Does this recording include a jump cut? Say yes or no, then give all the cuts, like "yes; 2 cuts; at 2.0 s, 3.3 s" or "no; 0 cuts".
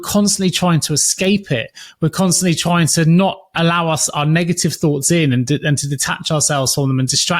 no; 0 cuts